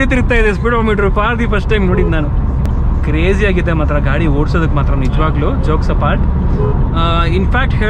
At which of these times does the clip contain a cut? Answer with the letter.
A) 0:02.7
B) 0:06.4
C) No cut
A